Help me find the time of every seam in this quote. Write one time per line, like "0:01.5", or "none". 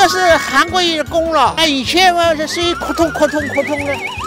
0:01.6